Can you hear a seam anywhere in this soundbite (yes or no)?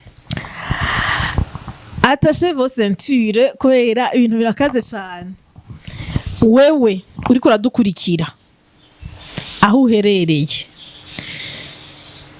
no